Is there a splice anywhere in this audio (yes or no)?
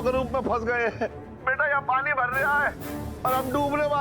yes